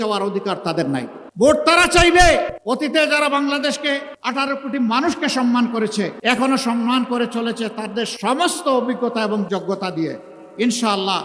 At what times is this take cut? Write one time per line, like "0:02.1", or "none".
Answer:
0:01.2
0:02.6
0:04.1
0:06.1